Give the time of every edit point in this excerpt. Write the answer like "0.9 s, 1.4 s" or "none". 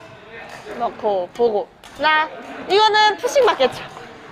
none